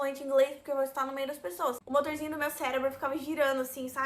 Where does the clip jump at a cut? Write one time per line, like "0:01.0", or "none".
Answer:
0:01.8